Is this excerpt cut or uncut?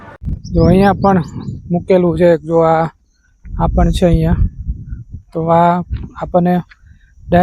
uncut